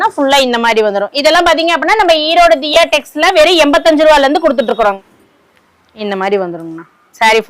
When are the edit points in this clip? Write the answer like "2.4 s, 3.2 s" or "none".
5.0 s